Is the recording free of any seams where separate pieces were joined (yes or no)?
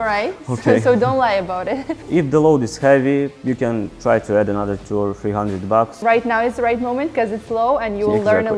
no